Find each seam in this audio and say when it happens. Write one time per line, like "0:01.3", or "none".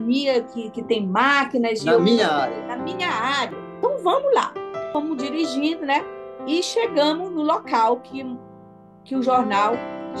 0:03.6
0:04.9